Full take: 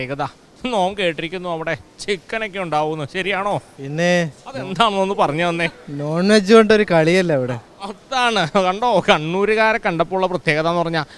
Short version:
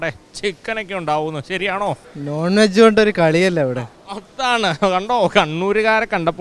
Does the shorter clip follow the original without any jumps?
no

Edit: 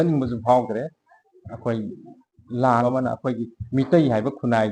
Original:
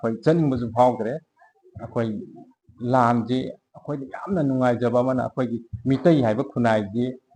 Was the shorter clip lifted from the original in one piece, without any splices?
no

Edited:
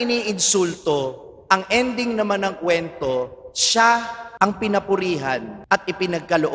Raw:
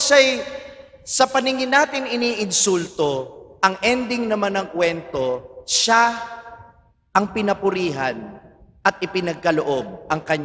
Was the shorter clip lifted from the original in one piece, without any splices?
no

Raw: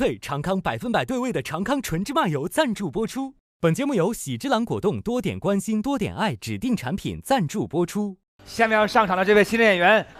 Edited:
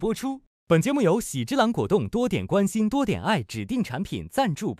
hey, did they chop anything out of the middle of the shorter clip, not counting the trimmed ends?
no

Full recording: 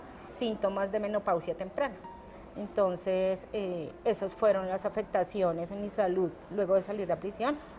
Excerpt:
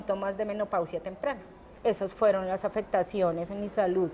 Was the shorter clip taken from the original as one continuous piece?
no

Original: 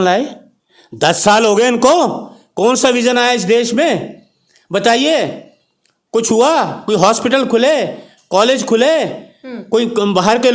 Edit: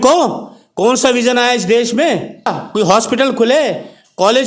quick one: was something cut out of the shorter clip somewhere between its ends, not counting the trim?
yes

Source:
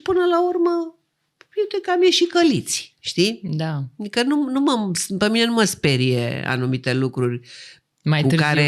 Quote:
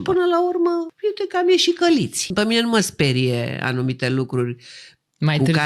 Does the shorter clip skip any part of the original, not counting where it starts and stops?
yes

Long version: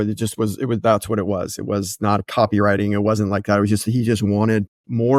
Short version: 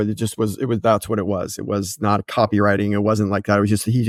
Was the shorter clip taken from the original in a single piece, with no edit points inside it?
yes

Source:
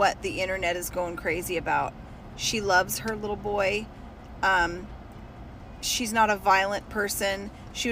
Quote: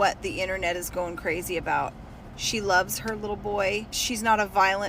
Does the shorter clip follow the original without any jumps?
no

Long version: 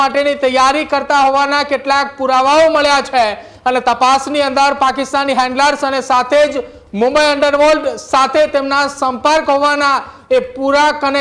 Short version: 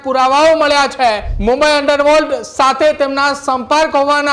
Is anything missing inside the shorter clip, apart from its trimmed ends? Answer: yes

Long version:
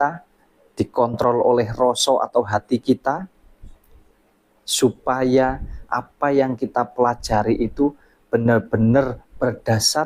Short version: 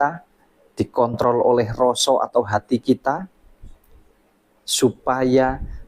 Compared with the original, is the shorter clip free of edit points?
yes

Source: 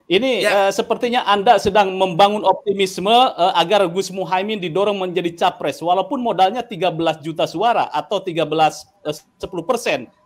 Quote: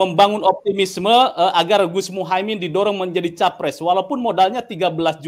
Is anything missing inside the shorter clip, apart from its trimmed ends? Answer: no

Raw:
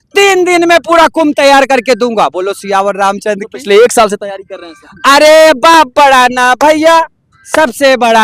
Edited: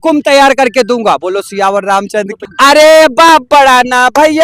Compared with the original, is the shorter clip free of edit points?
no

